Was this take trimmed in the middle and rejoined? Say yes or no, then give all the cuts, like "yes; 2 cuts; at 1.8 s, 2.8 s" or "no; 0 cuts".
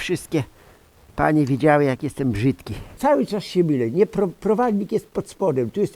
yes; 1 cut; at 2.9 s